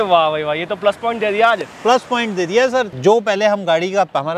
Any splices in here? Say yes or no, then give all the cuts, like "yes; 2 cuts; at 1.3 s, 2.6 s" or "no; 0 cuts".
no; 0 cuts